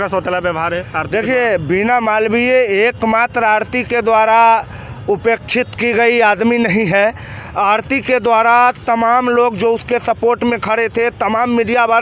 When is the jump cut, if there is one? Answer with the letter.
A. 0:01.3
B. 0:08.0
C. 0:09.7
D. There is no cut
D